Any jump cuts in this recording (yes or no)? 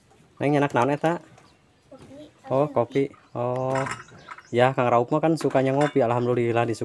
no